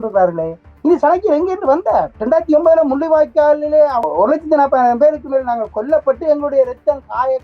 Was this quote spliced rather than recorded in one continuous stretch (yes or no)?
yes